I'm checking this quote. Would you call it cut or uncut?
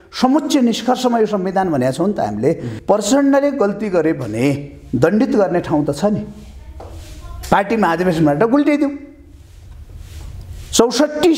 cut